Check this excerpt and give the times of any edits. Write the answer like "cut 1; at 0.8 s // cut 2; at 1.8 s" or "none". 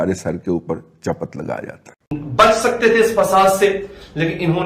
cut 1; at 2.1 s